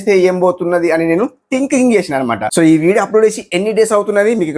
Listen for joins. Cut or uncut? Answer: cut